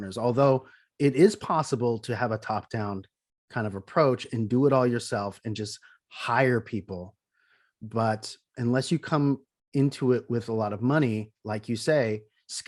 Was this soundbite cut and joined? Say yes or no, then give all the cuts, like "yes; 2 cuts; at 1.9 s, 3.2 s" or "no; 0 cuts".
no; 0 cuts